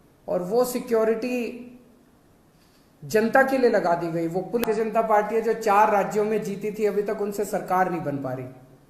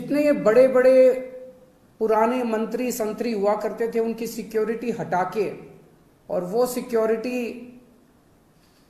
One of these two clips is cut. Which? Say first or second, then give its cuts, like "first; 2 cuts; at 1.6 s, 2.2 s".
first; 1 cut; at 4.6 s